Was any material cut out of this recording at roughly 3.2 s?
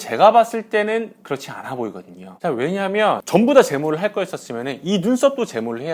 yes; 1 cut; at 3.2 s

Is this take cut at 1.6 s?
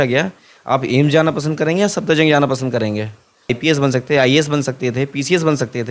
no; 1 cut; at 3.6 s

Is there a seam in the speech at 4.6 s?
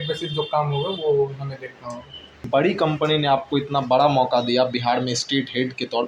no; 1 cut; at 2.4 s

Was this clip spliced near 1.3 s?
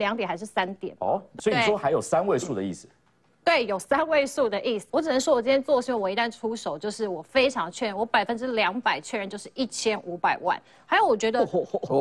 yes; 2 cuts; at 1.3 s, 4.8 s

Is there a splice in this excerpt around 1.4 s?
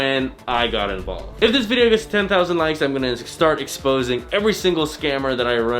yes; 1 cut; at 1.4 s

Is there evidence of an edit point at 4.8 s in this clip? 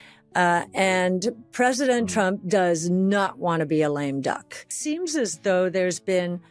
yes; 1 cut; at 4.8 s

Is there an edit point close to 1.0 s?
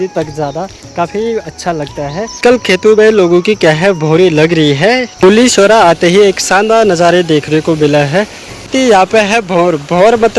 no; 3 cuts; at 2.7 s, 5.5 s, 9.0 s

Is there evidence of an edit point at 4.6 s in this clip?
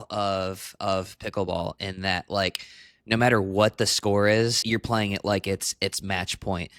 yes; 1 cut; at 4.6 s

